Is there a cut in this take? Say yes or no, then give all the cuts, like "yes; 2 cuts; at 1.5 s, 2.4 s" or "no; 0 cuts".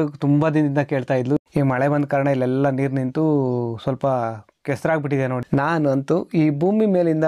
yes; 2 cuts; at 1.4 s, 5.4 s